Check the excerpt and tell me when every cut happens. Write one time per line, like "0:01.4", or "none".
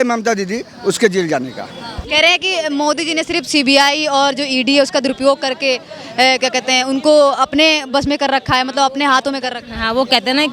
0:02.0